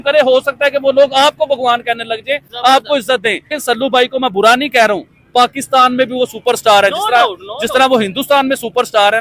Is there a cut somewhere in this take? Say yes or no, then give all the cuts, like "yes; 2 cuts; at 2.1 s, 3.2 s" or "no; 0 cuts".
yes; 1 cut; at 3.6 s